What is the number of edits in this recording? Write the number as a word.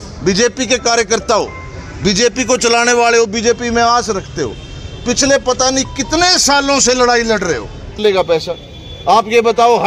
one